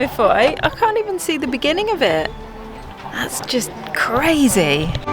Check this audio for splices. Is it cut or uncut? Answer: uncut